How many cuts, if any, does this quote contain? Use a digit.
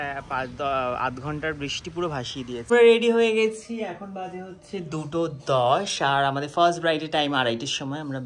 1